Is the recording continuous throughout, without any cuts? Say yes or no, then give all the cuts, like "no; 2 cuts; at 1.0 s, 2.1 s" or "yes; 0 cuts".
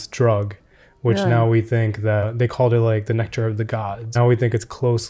no; 2 cuts; at 2.3 s, 4.1 s